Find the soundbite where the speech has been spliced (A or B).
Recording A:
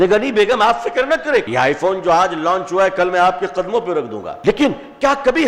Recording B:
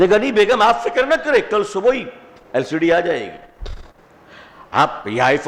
A